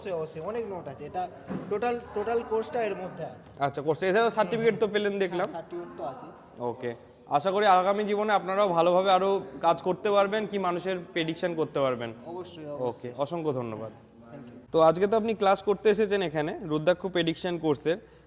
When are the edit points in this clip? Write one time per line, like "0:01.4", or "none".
none